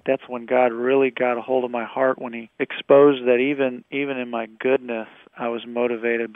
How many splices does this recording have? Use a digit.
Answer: 1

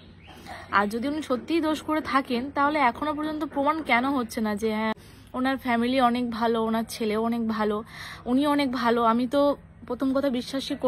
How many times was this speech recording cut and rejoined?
1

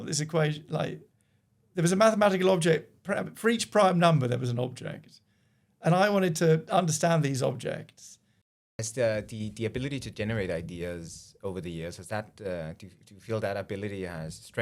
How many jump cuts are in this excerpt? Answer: 1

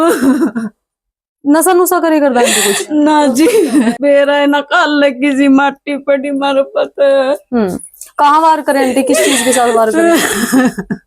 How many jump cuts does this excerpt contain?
1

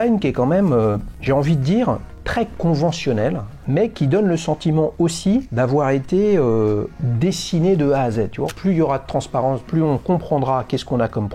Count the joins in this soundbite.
7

